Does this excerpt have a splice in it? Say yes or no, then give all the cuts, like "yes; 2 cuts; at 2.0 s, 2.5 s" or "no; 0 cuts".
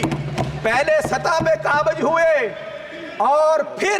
no; 0 cuts